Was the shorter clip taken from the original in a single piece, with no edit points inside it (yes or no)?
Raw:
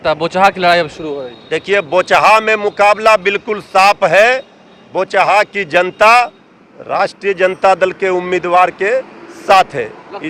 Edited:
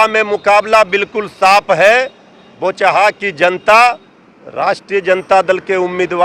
yes